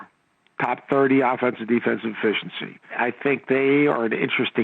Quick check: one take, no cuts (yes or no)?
no